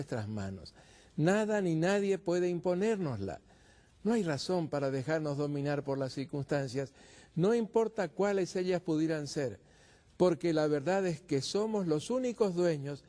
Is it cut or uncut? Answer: cut